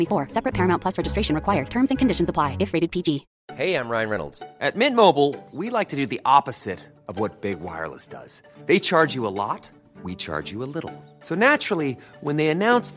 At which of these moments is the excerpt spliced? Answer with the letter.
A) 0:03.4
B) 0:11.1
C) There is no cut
A